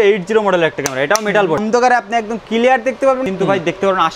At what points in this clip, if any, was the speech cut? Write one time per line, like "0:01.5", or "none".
0:01.6
0:03.2